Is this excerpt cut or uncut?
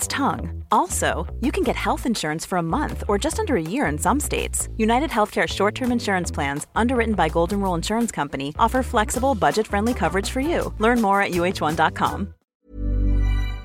cut